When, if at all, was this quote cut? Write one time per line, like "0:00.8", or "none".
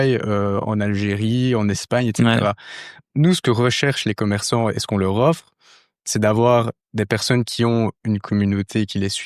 0:02.8